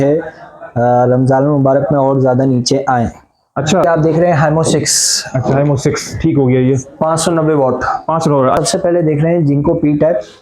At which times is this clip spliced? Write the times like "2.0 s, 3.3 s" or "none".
3.8 s, 8.6 s